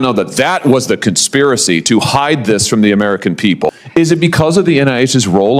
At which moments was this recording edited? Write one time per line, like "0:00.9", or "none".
0:03.7